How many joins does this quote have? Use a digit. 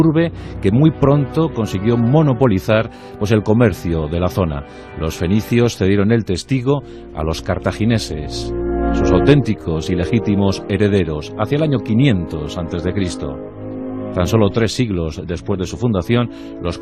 1